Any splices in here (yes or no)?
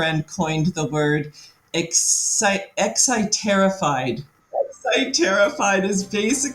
yes